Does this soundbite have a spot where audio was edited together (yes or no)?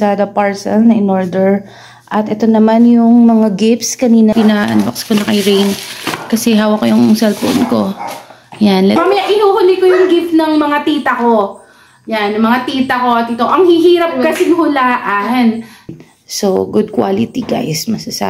yes